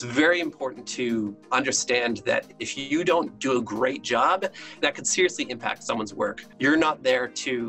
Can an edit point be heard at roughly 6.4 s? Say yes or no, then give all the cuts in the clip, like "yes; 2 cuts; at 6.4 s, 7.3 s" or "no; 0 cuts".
yes; 3 cuts; at 1.4 s, 4.8 s, 6.4 s